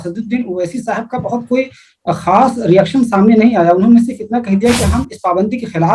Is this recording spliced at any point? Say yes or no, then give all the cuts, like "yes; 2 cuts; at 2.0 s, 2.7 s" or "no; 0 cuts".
no; 0 cuts